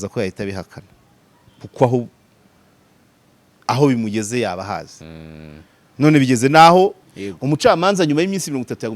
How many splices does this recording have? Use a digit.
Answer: 1